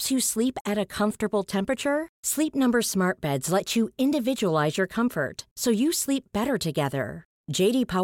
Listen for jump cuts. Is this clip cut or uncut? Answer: uncut